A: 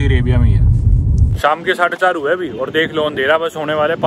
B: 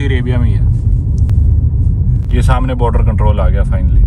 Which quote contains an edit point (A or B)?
A